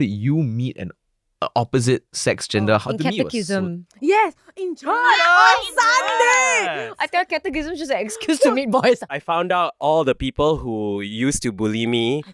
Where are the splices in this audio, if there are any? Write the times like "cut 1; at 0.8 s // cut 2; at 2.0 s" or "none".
cut 1; at 2.8 s // cut 2; at 6.9 s // cut 3; at 9.1 s

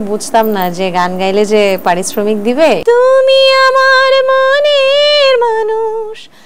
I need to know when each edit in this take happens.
cut 1; at 2.8 s

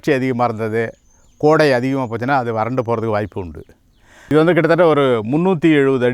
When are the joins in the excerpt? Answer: cut 1; at 4.3 s

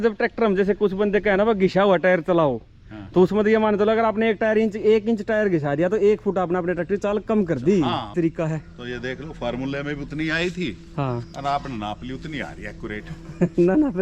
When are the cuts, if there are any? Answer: cut 1; at 8.1 s

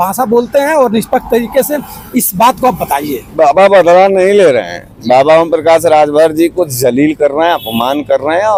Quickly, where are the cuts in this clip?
none

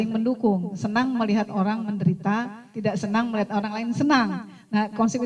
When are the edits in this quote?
none

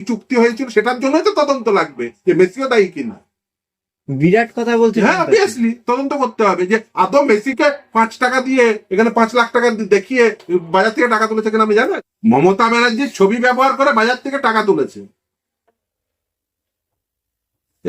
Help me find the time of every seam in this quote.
cut 1; at 12.1 s

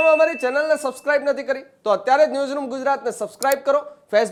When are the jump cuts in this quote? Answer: none

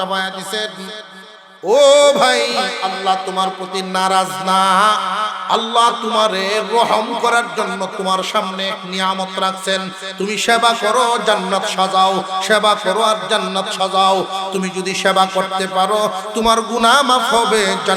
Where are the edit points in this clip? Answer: none

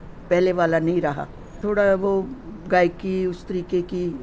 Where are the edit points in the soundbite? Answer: cut 1; at 1.5 s

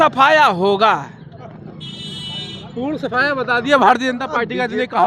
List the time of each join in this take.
none

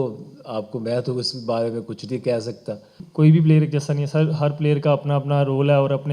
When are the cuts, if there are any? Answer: cut 1; at 3.0 s

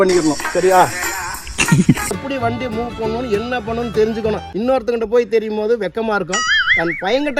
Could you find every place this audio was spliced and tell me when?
cut 1; at 2.2 s

